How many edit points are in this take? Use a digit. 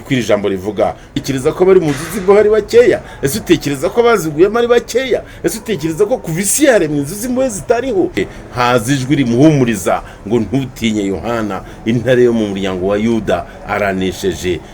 2